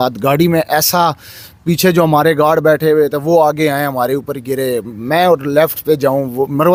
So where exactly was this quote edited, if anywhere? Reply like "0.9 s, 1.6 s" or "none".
none